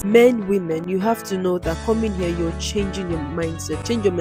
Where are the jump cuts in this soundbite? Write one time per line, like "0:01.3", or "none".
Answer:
none